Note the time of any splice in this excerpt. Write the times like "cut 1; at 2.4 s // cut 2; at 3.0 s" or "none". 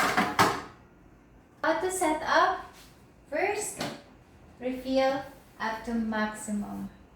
cut 1; at 1.6 s